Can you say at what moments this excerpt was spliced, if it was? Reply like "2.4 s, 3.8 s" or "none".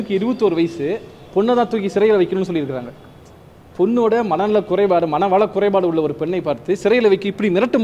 none